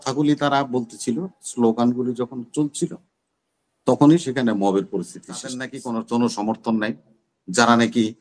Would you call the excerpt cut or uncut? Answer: cut